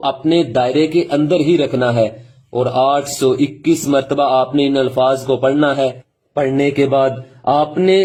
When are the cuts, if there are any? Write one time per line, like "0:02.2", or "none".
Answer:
none